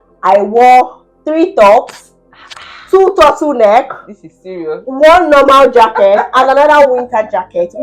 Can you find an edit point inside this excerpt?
no; 0 cuts

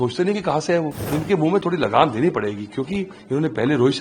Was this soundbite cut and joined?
yes; 1 cut; at 1.1 s

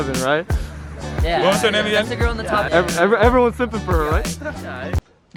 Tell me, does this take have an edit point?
no; 0 cuts

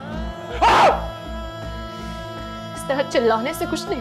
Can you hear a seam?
no; 0 cuts

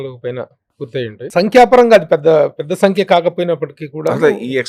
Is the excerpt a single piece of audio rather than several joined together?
no; 1 cut; at 1.2 s

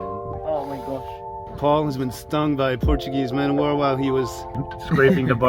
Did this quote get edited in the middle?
no; 0 cuts

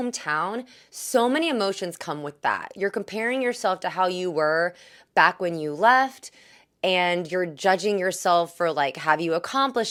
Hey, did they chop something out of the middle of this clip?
no; 0 cuts

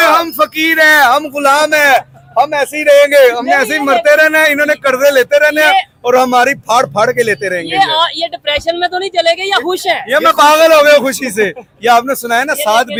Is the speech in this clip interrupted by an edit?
no; 0 cuts

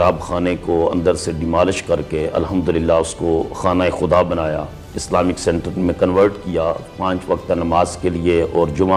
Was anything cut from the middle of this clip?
no; 0 cuts

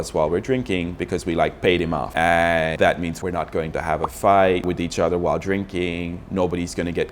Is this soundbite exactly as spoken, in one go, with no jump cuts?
no; 2 cuts; at 2.1 s, 3.2 s

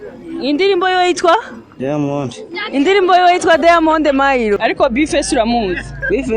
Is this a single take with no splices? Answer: no; 1 cut; at 4.6 s

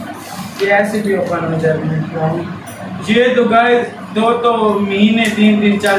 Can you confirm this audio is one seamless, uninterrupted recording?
yes; 0 cuts

